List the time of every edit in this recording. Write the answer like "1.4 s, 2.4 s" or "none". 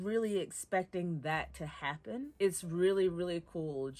2.3 s